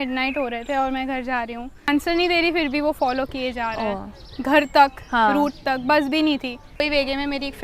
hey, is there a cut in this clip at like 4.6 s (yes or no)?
no